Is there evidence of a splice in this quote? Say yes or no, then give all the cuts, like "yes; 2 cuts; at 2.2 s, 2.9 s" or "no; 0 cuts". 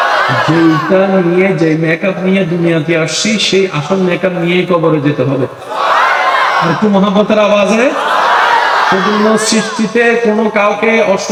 no; 0 cuts